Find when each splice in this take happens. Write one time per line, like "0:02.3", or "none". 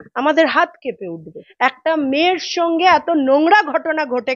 0:01.4